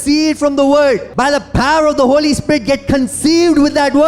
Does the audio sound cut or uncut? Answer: cut